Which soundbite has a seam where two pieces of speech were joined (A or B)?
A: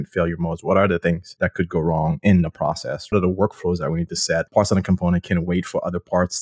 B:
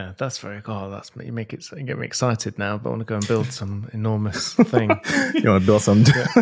A